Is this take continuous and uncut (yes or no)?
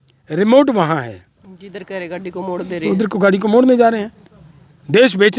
yes